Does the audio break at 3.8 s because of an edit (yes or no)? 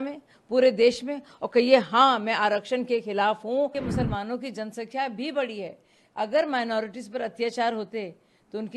yes